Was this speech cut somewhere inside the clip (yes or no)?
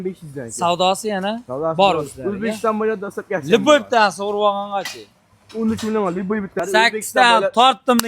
yes